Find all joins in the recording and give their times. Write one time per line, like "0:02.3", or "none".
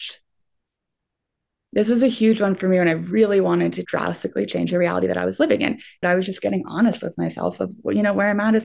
0:06.0